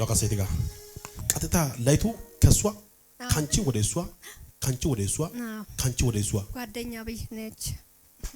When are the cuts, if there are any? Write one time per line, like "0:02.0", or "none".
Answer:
none